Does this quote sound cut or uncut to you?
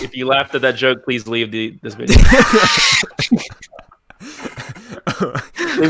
uncut